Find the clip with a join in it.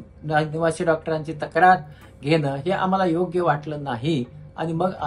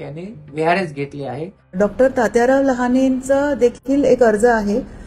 second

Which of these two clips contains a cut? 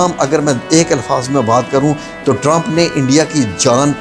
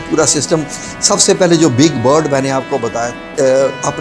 second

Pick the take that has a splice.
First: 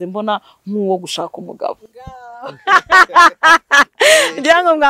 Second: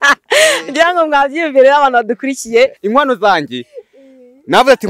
second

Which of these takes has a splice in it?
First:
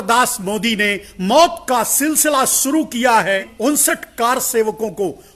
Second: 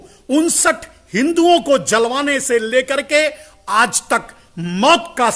first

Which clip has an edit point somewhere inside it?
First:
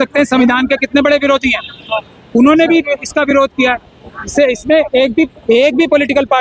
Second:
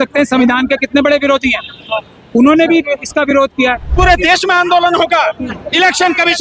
second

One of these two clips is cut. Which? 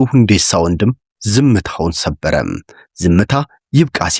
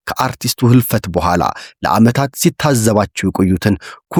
first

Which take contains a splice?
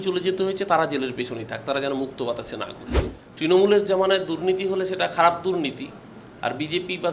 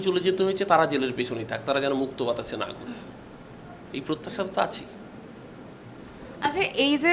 first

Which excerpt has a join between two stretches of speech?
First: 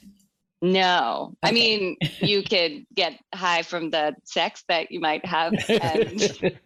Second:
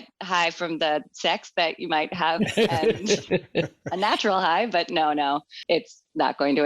second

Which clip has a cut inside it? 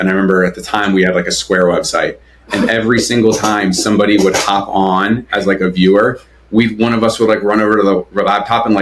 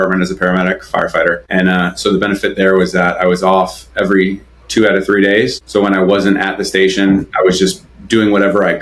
second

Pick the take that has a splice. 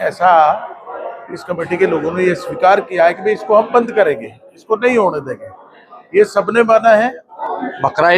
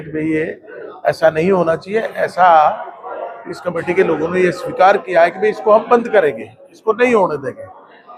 first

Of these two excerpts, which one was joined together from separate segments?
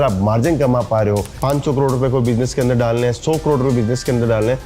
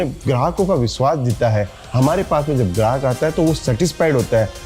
first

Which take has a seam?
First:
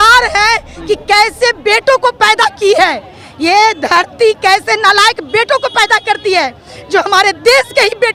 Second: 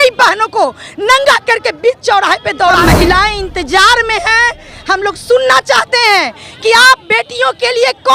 second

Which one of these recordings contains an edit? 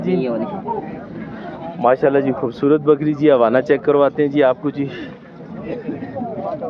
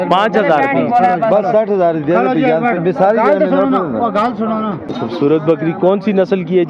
second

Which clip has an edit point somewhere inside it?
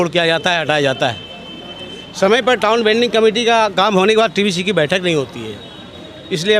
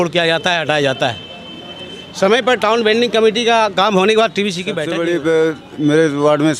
second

